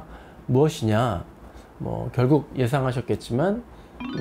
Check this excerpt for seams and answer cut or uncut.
uncut